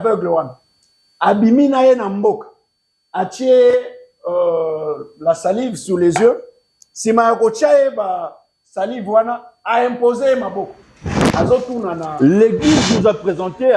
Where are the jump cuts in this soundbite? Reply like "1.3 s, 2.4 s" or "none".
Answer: 12.0 s

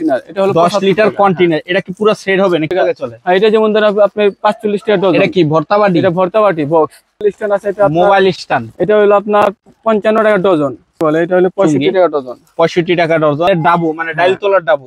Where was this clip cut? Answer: 2.7 s, 7.2 s, 11.0 s, 13.5 s

